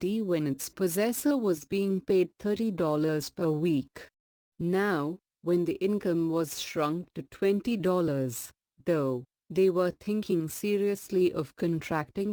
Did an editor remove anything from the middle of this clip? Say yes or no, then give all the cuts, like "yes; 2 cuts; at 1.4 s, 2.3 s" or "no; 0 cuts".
no; 0 cuts